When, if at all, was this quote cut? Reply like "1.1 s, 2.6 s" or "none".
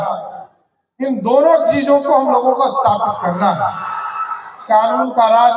4.6 s

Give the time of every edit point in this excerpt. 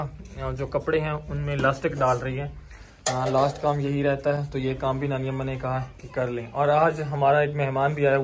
none

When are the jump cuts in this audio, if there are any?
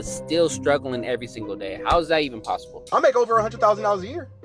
2.7 s

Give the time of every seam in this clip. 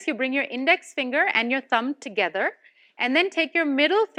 none

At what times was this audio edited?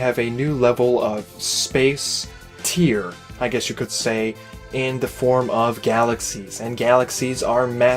2.9 s

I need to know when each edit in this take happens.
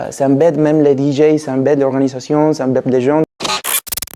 3.2 s

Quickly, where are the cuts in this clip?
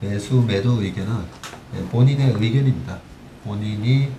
none

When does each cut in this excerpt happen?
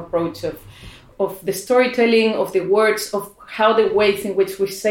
1.1 s

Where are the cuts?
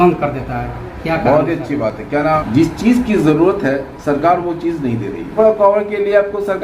2.4 s, 5.3 s

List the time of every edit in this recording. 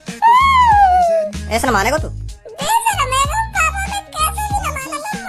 1.3 s

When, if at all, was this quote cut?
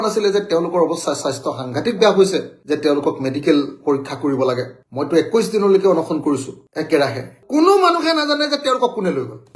none

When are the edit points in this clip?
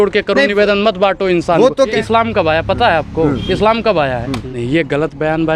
2.0 s, 4.5 s

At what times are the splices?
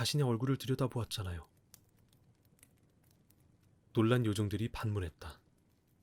1.7 s, 3.5 s

